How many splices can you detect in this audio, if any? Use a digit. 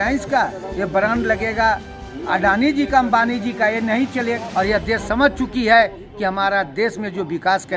1